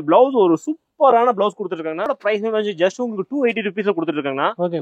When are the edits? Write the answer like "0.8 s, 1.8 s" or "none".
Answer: 2.2 s